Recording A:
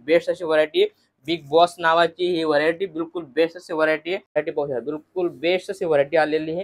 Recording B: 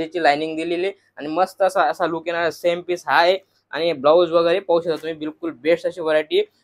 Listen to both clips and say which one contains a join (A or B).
A